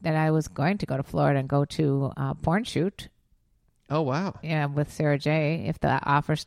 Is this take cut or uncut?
uncut